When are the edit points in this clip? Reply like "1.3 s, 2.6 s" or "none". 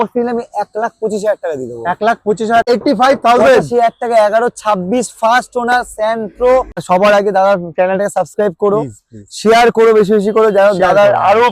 2.7 s, 6.8 s